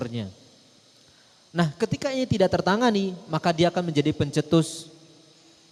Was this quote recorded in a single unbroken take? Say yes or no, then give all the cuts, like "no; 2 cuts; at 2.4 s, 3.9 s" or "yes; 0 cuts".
yes; 0 cuts